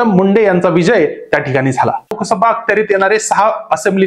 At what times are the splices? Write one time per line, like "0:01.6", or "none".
0:02.1